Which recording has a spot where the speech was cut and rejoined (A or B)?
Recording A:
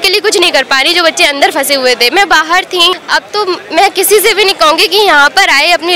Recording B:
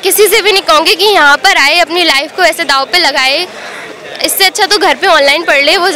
A